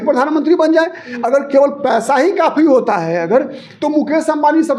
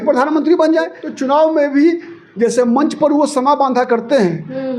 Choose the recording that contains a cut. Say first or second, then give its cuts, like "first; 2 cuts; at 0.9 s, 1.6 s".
second; 1 cut; at 1.0 s